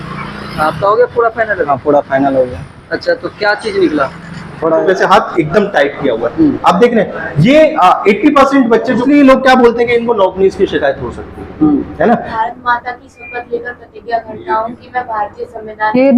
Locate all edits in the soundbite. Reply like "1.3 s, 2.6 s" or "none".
4.8 s, 9.0 s, 12.3 s